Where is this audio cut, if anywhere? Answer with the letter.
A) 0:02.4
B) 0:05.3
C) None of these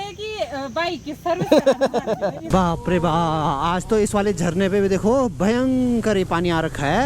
A